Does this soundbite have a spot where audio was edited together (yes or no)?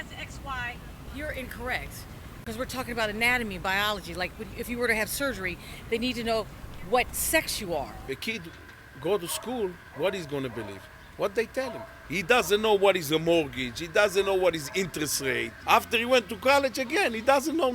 yes